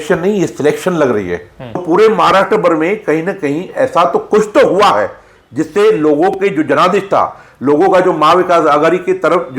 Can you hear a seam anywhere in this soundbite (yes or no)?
yes